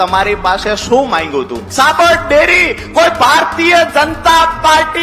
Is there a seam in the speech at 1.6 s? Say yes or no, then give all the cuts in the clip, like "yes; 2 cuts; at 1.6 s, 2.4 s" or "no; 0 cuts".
yes; 1 cut; at 1.6 s